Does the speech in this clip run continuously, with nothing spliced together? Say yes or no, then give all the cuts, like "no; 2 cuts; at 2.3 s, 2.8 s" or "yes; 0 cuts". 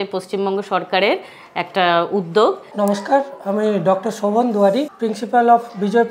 no; 2 cuts; at 2.7 s, 4.9 s